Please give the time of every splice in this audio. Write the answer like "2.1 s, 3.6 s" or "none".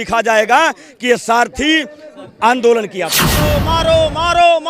3.4 s